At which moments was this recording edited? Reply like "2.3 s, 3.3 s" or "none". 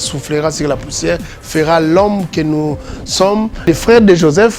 3.7 s